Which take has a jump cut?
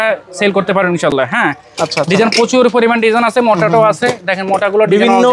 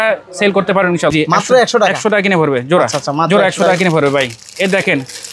second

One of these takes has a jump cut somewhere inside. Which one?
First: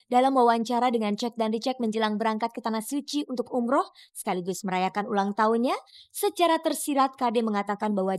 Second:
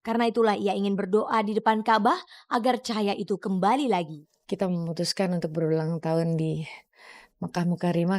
second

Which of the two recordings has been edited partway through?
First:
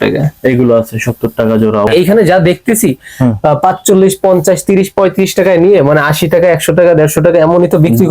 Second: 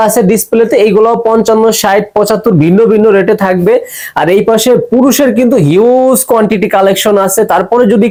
first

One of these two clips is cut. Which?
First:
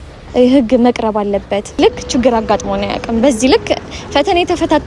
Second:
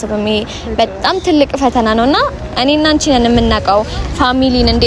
first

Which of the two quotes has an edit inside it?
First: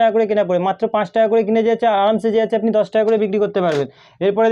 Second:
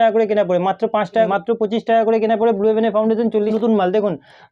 second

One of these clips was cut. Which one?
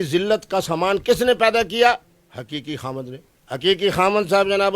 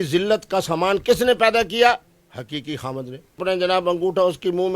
second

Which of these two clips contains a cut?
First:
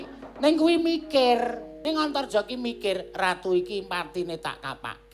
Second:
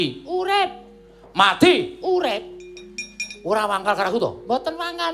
first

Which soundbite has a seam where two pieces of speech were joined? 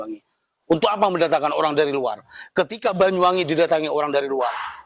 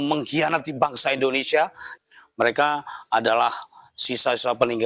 second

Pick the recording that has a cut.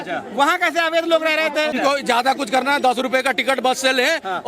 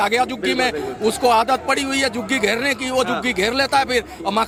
first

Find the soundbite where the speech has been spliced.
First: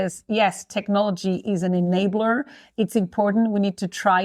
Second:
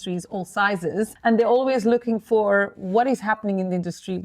second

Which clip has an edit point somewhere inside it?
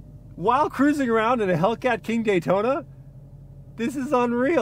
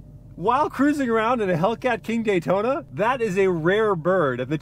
second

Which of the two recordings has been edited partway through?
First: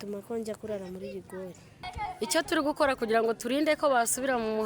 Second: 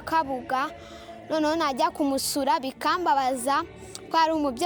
first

